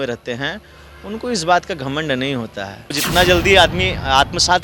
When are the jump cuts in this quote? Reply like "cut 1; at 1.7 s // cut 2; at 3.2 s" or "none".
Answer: cut 1; at 2.9 s